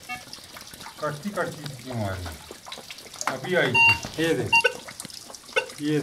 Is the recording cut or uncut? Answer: uncut